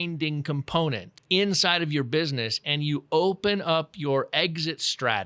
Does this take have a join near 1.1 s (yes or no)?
yes